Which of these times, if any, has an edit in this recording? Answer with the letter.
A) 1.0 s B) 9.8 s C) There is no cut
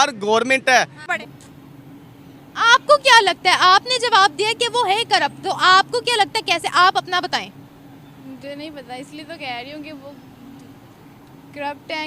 A